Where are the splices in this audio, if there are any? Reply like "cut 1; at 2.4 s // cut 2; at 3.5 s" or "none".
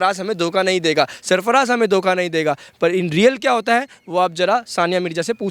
none